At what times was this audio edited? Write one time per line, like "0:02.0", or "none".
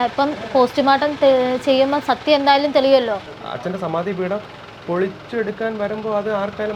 0:03.4